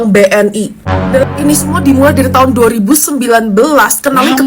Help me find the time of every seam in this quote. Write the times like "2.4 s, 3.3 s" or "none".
1.2 s